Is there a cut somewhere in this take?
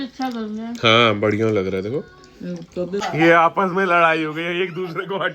yes; 1 cut; at 3.0 s

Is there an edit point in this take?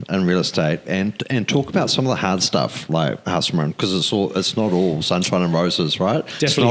no; 0 cuts

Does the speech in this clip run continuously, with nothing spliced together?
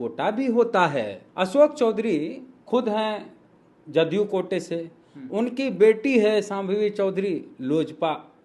no; 1 cut; at 1.2 s

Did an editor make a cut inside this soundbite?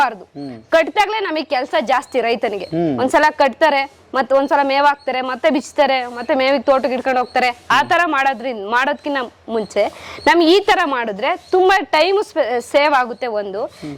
no; 0 cuts

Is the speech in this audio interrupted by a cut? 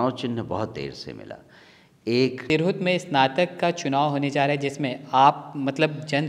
yes; 1 cut; at 2.4 s

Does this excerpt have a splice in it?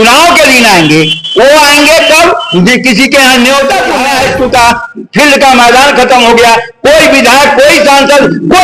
yes; 1 cut; at 4.0 s

